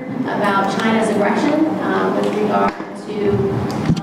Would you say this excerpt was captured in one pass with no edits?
yes; 0 cuts

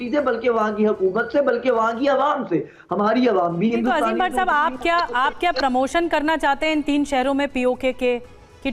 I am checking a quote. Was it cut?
no; 0 cuts

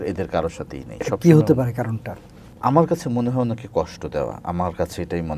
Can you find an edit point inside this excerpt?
yes; 1 cut; at 2.4 s

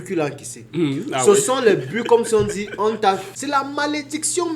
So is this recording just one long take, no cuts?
no; 1 cut; at 3.3 s

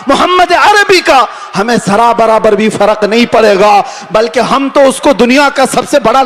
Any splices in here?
no; 0 cuts

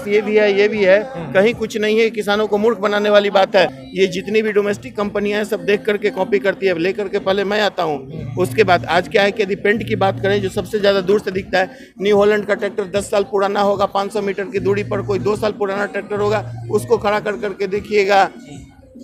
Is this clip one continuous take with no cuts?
yes; 0 cuts

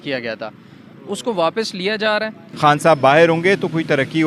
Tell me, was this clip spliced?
yes; 1 cut; at 2.4 s

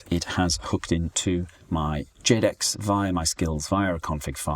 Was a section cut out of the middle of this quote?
yes; 1 cut; at 1.8 s

